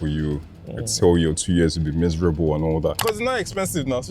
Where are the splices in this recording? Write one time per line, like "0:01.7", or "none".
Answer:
0:03.0